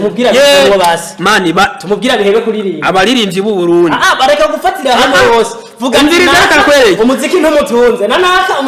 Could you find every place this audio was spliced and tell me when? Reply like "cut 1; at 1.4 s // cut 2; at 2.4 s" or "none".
none